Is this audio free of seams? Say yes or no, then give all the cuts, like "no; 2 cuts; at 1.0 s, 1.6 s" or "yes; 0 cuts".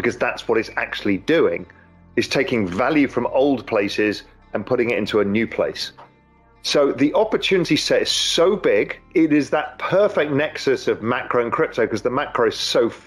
no; 1 cut; at 9.0 s